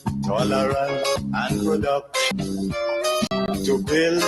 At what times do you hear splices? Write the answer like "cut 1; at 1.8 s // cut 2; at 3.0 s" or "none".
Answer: cut 1; at 1.2 s // cut 2; at 2.3 s // cut 3; at 3.3 s